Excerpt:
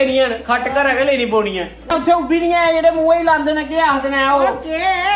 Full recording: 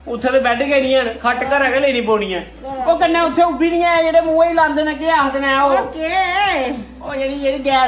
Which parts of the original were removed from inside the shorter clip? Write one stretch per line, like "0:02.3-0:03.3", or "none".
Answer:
0:02.7-0:03.2